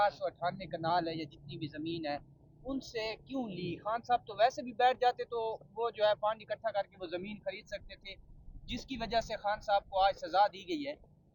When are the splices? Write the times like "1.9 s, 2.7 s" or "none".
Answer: none